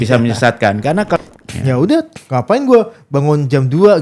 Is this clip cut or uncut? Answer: cut